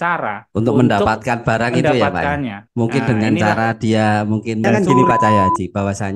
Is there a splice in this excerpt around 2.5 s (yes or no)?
no